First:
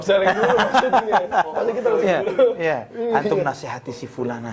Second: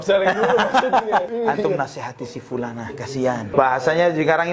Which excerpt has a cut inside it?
second; 2 cuts; at 1.3 s, 3.5 s

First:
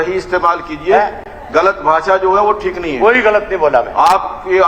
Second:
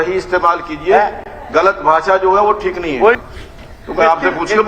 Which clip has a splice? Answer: second; 1 cut; at 3.2 s

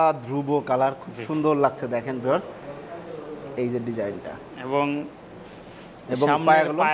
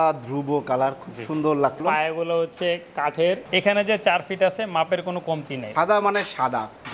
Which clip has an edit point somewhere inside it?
second; 3 cuts; at 1.8 s, 3.4 s, 5.6 s

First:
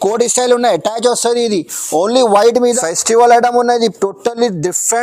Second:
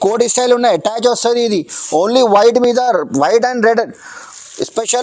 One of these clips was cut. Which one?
first; 1 cut; at 2.8 s

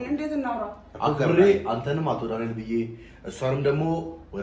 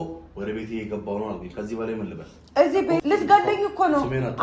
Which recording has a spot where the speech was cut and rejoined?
second; 1 cut; at 3.0 s

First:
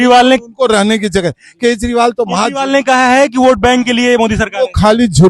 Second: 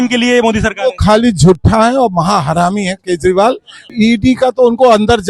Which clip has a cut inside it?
second; 1 cut; at 3.8 s

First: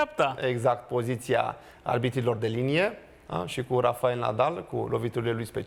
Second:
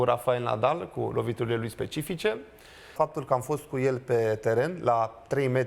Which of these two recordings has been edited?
second; 1 cut; at 2.9 s

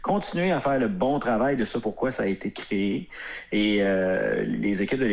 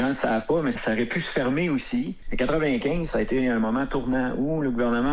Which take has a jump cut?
second; 2 cuts; at 0.8 s, 2.2 s

